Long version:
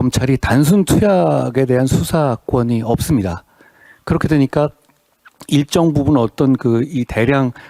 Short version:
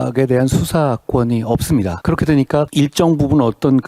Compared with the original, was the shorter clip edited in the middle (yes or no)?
yes